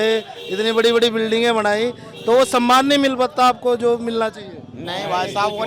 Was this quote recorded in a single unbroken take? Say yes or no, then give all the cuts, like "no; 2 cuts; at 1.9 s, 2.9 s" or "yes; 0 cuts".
yes; 0 cuts